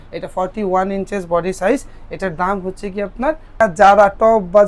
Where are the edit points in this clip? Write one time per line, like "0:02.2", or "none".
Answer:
0:03.6